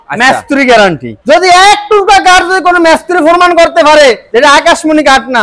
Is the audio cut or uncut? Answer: cut